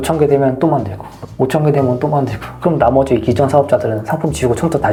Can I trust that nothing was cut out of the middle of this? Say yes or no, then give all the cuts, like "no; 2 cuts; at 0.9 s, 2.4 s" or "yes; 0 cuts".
yes; 0 cuts